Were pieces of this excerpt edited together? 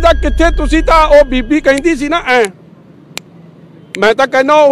no; 0 cuts

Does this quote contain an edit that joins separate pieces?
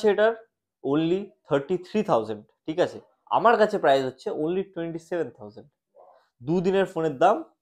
no; 0 cuts

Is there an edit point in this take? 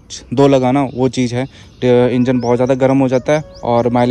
no; 0 cuts

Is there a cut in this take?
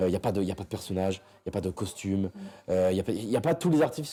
no; 0 cuts

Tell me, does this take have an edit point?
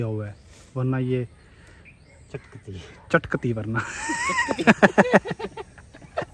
no; 0 cuts

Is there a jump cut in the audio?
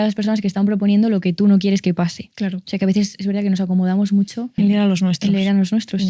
yes; 1 cut; at 4.6 s

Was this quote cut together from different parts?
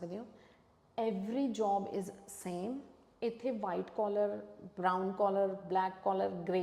no; 0 cuts

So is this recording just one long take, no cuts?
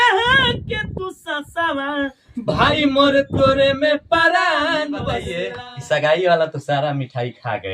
no; 1 cut; at 5.4 s

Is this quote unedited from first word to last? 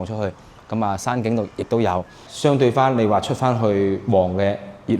no; 1 cut; at 2.2 s

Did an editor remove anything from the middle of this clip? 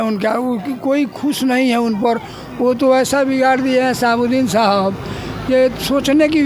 no; 0 cuts

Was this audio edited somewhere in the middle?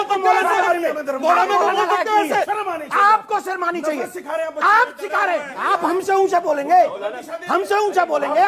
yes; 2 cuts; at 2.5 s, 5.5 s

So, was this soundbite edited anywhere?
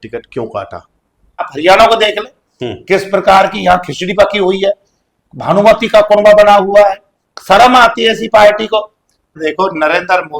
yes; 2 cuts; at 1.5 s, 9.3 s

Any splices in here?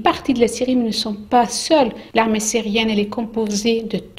yes; 1 cut; at 2.0 s

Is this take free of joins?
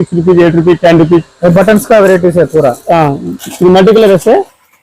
no; 1 cut; at 1.3 s

